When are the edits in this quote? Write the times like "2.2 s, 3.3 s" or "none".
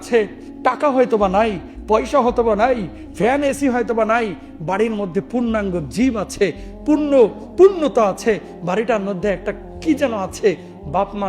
none